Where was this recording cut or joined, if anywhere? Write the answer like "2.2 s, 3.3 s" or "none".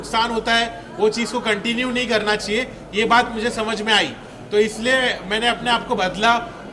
none